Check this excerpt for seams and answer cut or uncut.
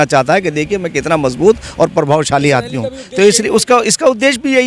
uncut